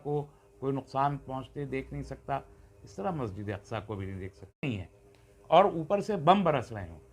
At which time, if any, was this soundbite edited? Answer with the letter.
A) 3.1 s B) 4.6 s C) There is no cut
B